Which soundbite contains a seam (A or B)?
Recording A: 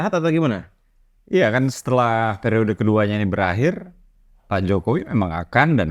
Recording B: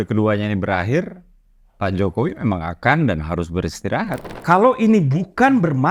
B